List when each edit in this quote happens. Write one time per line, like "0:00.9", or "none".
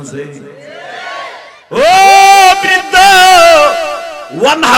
0:01.5